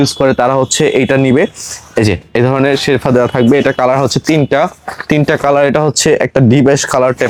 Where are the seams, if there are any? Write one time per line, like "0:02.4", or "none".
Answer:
none